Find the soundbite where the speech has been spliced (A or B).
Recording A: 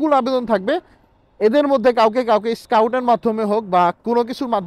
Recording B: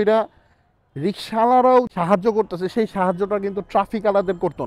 B